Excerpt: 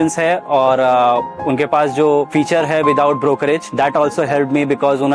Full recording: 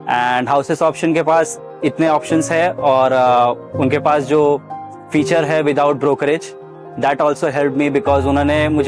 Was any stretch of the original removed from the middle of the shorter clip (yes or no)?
yes